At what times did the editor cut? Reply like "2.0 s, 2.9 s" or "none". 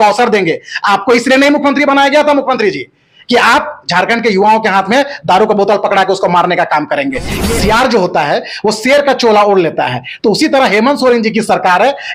7.4 s